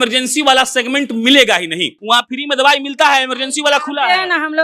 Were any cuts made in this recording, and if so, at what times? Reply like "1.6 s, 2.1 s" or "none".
1.9 s